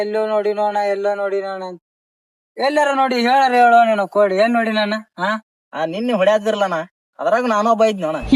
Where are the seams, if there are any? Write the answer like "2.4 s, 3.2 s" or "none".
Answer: none